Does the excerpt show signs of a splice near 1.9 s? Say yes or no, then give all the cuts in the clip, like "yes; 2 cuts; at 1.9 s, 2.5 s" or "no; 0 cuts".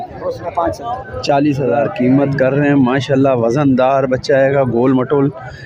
yes; 1 cut; at 1.9 s